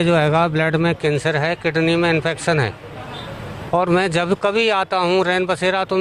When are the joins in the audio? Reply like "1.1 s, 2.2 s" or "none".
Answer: none